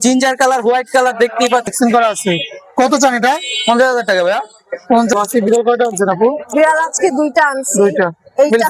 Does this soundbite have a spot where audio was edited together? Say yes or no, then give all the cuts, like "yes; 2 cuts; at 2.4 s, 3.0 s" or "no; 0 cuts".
yes; 2 cuts; at 1.7 s, 5.1 s